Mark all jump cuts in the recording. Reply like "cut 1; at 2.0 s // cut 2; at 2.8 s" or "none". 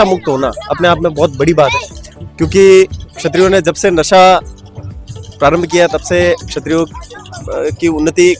none